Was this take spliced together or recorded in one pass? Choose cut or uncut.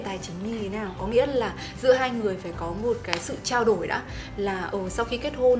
uncut